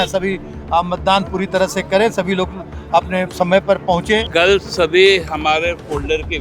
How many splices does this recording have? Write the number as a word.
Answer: one